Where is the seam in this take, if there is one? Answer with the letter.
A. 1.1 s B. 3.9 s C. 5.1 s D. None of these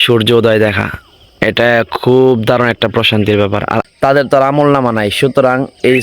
B